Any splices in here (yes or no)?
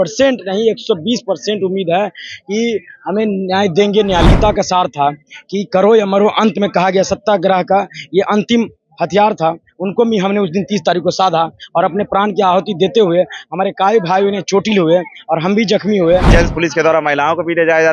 yes